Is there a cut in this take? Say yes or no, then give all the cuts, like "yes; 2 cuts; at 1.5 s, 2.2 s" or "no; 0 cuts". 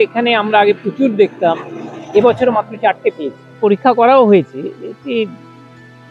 yes; 1 cut; at 3.5 s